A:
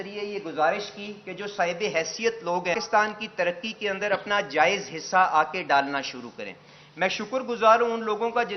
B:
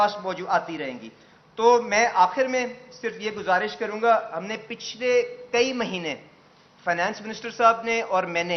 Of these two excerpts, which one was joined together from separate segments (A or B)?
A